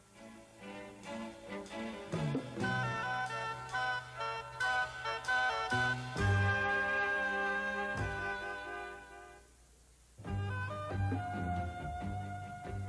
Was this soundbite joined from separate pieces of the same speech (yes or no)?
yes